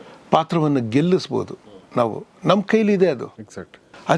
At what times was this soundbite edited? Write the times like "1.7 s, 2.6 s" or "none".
none